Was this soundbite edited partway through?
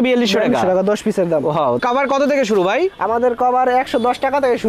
yes; 1 cut; at 1.8 s

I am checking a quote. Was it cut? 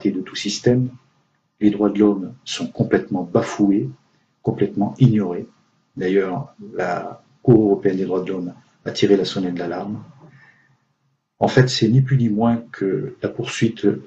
no; 0 cuts

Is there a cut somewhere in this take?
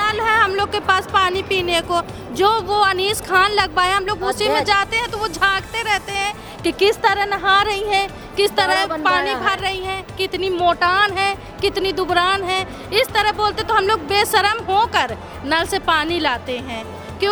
no; 0 cuts

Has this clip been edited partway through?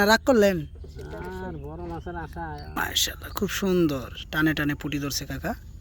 yes; 1 cut; at 2.8 s

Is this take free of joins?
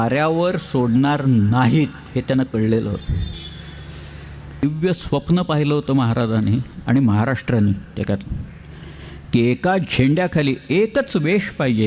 no; 1 cut; at 4.6 s

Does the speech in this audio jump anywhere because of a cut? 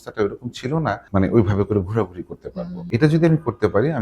yes; 2 cuts; at 1.0 s, 2.8 s

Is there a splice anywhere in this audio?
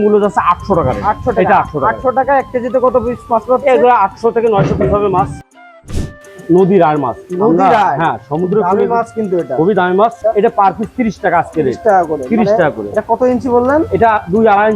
yes; 2 cuts; at 5.8 s, 10.2 s

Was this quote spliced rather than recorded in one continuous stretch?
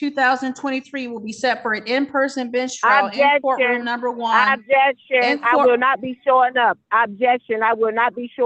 no; 0 cuts

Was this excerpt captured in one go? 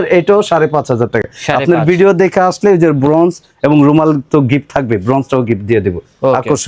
yes; 0 cuts

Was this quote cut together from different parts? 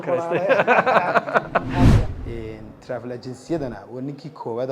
yes; 1 cut; at 2.1 s

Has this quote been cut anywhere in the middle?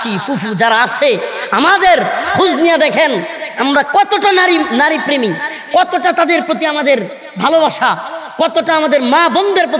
no; 0 cuts

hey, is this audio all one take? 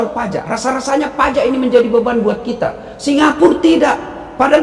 yes; 0 cuts

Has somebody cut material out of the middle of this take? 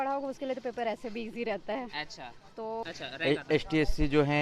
yes; 1 cut; at 2.8 s

